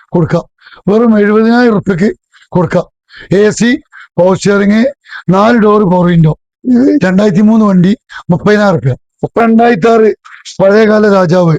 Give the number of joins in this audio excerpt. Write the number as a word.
two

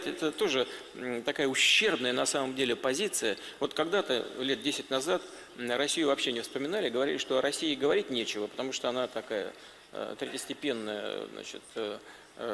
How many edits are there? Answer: one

